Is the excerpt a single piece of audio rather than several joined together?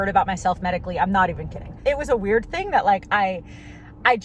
no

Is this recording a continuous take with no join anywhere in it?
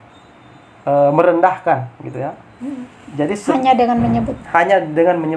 yes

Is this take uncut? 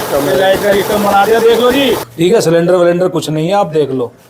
no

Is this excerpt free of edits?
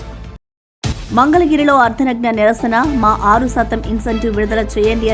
yes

